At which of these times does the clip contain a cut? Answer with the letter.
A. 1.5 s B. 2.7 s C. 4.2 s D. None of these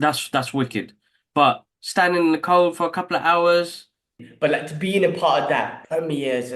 C